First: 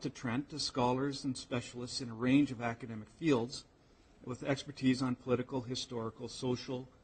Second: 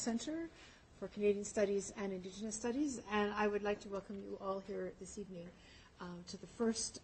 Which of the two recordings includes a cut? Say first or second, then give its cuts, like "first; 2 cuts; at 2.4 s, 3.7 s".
first; 1 cut; at 3.2 s